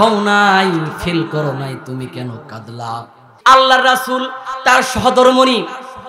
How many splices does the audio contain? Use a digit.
1